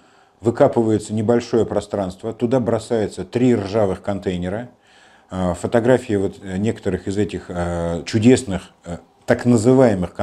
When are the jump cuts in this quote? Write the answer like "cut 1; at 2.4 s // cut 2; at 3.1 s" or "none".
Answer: none